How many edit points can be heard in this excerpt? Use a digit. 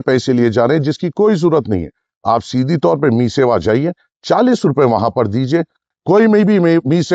1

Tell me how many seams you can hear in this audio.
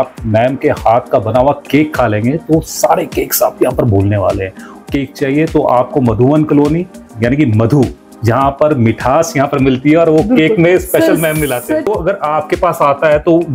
2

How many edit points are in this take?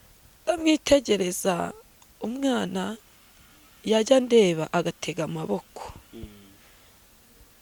0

